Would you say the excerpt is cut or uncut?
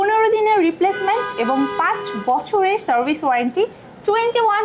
uncut